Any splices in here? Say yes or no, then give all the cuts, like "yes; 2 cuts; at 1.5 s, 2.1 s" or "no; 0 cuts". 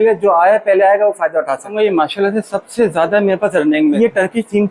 yes; 2 cuts; at 1.7 s, 4.0 s